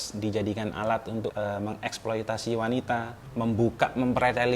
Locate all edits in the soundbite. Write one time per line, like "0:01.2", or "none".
0:01.3
0:03.2